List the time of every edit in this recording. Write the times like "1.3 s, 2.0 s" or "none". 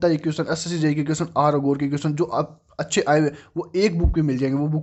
none